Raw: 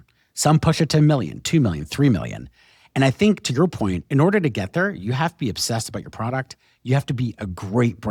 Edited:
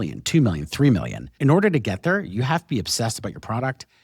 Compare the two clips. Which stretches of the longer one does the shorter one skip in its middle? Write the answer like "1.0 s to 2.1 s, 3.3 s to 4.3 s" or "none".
2.5 s to 4.0 s